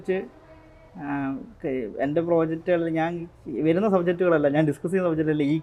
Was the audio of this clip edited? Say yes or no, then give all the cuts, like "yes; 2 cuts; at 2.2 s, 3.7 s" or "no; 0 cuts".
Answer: no; 0 cuts